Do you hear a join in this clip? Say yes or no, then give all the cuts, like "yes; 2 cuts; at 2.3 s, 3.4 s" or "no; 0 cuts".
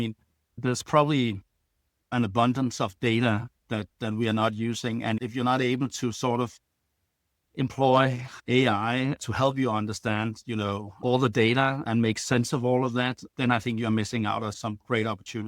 yes; 5 cuts; at 5.2 s, 11.0 s, 11.9 s, 13.3 s, 14.6 s